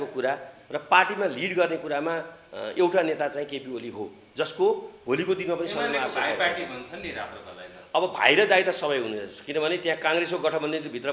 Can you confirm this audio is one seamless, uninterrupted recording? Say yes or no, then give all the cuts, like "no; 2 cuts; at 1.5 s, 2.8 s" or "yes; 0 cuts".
yes; 0 cuts